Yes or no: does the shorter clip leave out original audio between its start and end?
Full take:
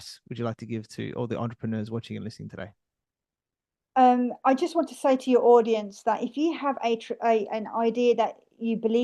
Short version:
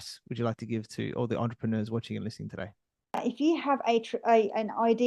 yes